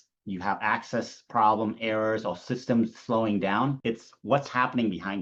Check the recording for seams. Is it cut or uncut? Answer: uncut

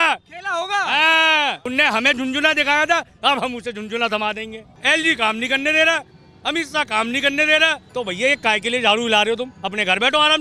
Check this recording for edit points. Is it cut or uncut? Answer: cut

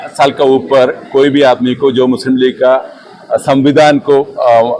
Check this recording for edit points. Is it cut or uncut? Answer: uncut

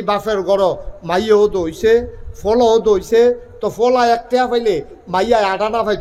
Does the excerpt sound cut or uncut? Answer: uncut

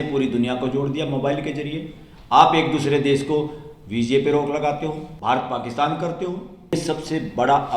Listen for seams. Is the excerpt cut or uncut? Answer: cut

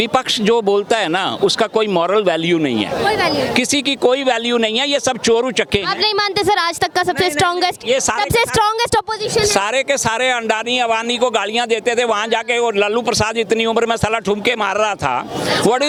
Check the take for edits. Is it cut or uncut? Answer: uncut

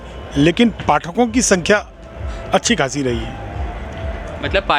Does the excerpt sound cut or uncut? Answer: uncut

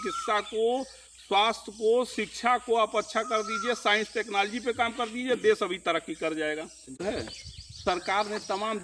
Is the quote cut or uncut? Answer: uncut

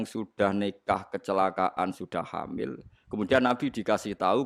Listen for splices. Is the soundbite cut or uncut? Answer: uncut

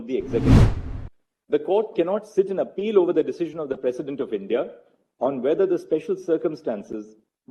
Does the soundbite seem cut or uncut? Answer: uncut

